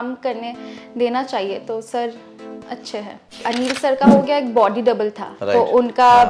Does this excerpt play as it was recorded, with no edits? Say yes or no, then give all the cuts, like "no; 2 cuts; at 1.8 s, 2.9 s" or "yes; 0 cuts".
no; 1 cut; at 3.4 s